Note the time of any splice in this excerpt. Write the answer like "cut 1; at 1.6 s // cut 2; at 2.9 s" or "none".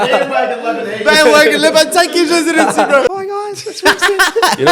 cut 1; at 3.1 s